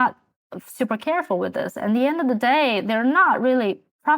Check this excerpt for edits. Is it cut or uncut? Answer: uncut